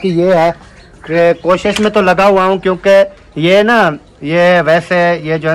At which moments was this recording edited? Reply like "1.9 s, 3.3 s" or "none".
none